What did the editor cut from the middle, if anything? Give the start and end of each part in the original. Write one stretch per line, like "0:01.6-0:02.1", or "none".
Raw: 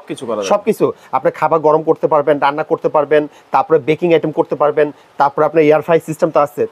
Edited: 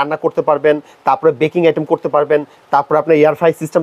none

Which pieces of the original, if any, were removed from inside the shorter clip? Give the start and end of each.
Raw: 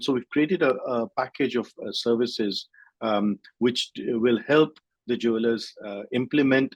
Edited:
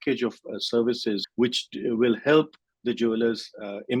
0:02.6-0:03.5

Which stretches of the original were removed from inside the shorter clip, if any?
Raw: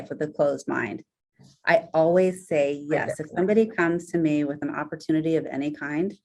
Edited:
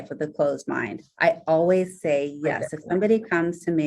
0:01.0-0:01.5

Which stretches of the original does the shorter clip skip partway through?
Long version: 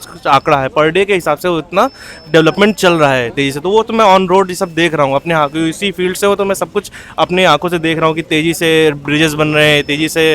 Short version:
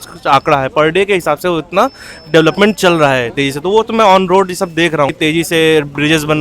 0:05.1-0:08.2

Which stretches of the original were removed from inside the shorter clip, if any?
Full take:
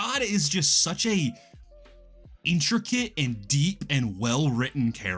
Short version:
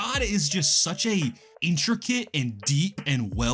0:01.5-0:02.3

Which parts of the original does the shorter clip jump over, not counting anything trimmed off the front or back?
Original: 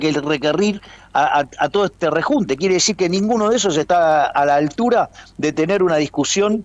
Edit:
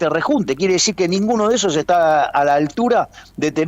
none

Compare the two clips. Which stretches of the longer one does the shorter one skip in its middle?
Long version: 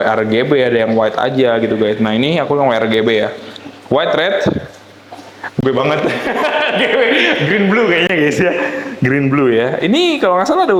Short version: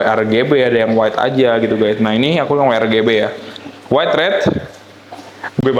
none

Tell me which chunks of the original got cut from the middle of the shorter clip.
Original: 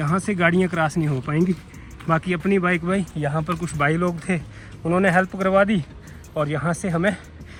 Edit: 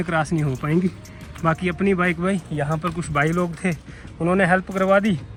none

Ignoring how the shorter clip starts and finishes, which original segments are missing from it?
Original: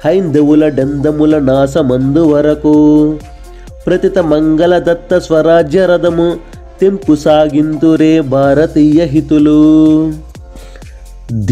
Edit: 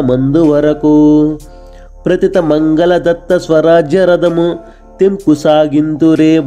none

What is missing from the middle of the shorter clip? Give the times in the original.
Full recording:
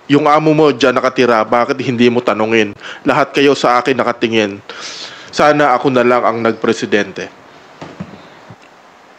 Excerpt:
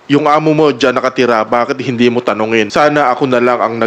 0:02.7-0:05.3

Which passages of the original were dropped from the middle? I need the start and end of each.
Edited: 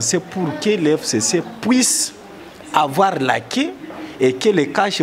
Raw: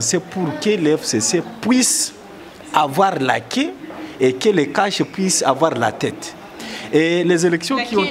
none

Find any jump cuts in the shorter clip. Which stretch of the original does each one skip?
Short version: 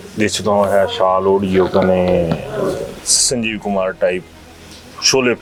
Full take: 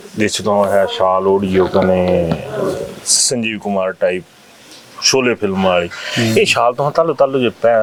none

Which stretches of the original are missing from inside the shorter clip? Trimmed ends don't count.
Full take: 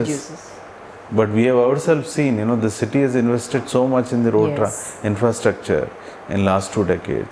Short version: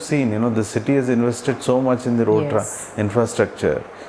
none

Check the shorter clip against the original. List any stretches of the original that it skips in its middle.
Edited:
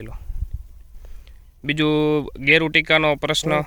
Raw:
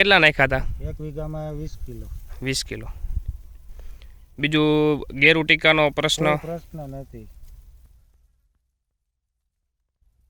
none

